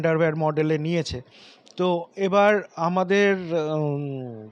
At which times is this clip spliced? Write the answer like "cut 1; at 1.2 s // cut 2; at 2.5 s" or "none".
none

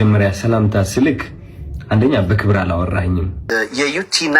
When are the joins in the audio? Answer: cut 1; at 3.4 s

